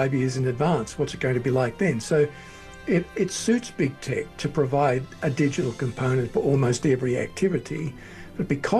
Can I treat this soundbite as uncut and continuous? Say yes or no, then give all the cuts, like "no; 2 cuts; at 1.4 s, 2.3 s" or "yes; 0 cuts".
yes; 0 cuts